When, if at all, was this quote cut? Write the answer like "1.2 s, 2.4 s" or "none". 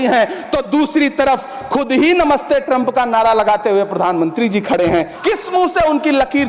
5.1 s